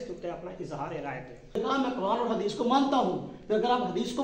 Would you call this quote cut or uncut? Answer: cut